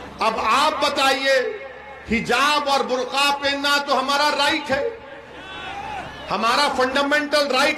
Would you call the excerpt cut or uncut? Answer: uncut